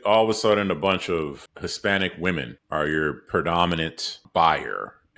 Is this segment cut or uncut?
cut